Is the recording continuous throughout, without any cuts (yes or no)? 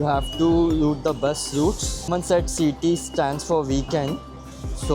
no